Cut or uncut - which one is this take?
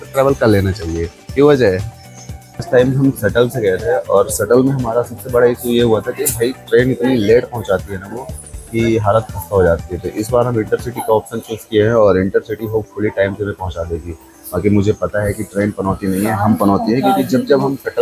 uncut